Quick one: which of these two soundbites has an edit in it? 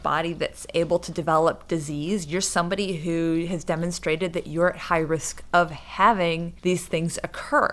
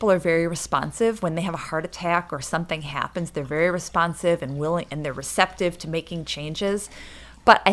first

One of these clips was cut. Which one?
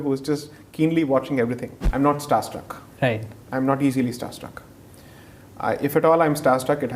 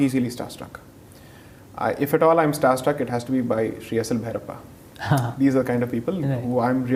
first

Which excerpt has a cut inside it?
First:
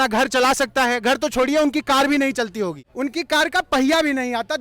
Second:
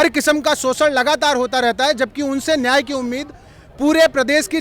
first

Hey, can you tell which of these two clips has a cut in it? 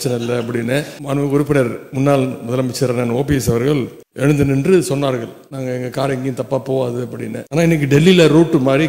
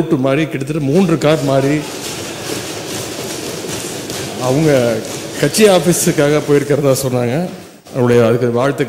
first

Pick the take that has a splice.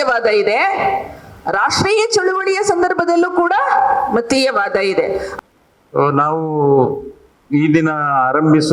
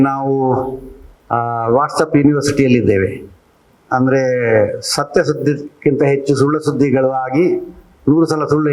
first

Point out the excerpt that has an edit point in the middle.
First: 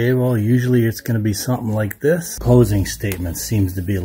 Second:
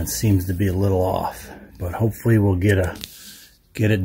first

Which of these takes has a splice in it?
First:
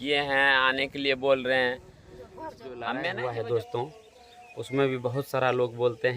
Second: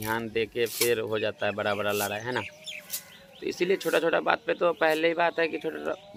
first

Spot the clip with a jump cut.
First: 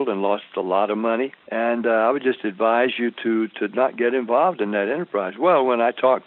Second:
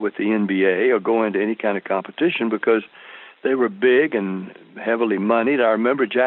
first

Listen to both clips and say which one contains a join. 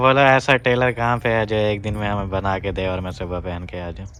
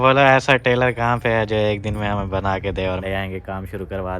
second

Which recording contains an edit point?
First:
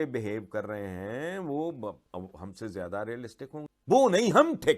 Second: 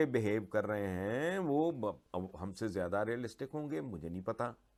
first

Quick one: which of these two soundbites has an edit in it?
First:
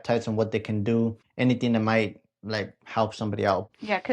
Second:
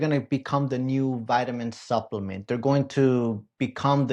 first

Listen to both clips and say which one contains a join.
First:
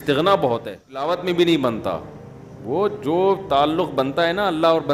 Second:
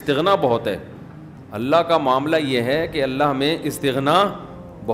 first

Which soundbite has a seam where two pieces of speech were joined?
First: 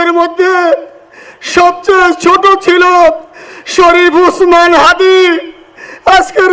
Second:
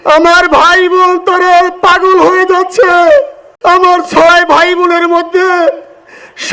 second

